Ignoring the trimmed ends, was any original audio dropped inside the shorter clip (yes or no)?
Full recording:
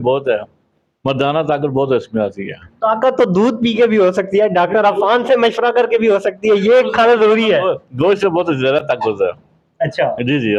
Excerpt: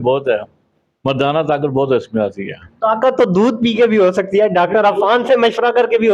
no